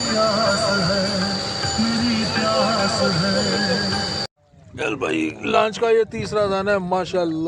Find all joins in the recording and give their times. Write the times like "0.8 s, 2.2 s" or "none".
4.4 s

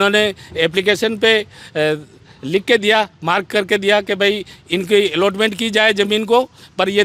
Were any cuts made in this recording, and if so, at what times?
none

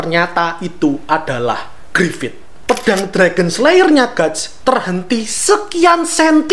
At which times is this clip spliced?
1.8 s, 2.5 s

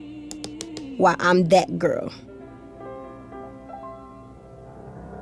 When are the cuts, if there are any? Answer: 2.3 s

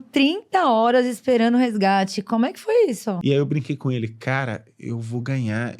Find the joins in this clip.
3.2 s

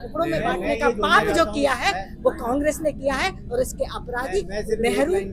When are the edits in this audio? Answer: none

